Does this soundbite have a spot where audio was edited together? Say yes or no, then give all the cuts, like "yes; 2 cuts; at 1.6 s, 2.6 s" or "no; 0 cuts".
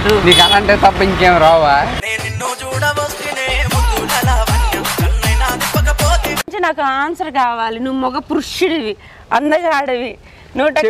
yes; 1 cut; at 6.5 s